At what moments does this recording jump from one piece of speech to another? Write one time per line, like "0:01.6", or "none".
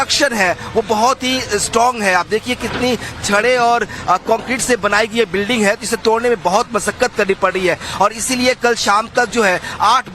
0:02.0